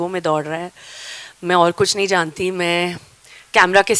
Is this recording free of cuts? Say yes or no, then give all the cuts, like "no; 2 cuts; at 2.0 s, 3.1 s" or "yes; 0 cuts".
yes; 0 cuts